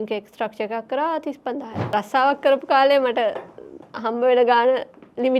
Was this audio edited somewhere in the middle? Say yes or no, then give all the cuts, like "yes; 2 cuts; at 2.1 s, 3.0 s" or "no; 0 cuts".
yes; 1 cut; at 1.8 s